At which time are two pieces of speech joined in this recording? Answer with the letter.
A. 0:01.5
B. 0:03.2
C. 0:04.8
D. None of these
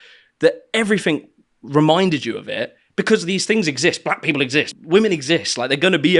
C